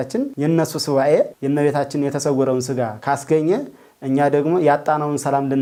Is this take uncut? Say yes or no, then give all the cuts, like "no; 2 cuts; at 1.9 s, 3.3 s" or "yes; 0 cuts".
yes; 0 cuts